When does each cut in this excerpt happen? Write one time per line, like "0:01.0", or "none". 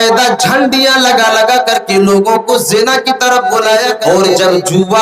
0:03.9